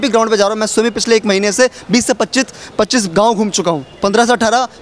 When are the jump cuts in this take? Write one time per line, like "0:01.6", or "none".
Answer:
none